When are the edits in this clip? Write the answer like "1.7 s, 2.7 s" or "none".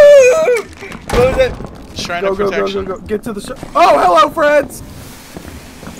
none